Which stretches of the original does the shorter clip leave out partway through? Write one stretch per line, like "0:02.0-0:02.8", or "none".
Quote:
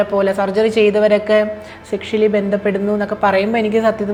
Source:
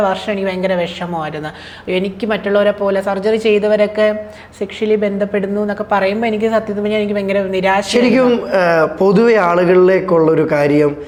none